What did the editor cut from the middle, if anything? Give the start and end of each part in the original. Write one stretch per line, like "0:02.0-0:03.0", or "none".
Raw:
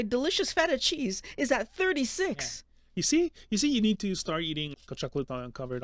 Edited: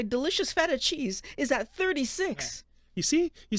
none